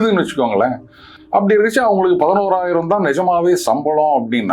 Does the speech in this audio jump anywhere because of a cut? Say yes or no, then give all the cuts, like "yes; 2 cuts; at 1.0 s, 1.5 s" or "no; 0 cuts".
no; 0 cuts